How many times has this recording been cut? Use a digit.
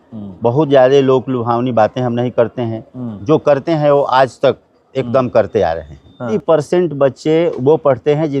1